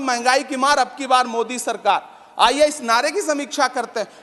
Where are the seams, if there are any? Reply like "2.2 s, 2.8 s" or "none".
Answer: none

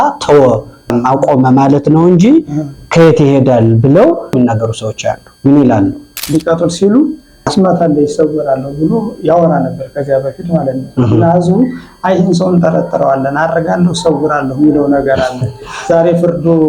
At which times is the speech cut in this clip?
0.9 s, 4.3 s, 6.2 s

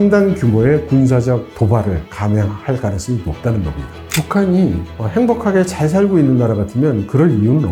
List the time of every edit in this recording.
none

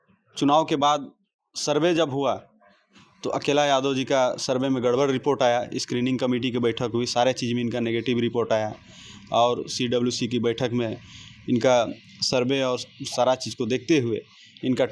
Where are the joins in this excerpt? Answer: none

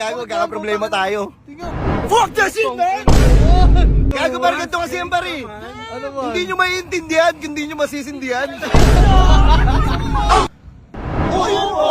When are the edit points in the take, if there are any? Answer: 4.1 s, 10.5 s

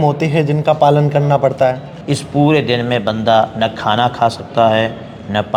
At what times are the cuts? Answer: 1.9 s

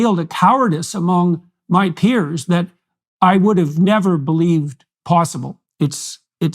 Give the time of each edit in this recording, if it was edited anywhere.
5.6 s

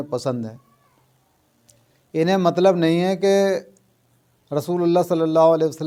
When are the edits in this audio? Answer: none

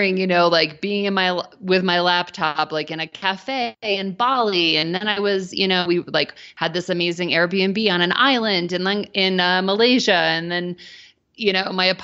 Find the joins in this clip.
none

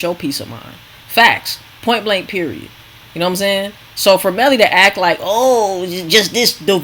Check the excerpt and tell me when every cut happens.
none

